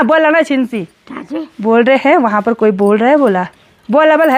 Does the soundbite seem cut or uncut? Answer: uncut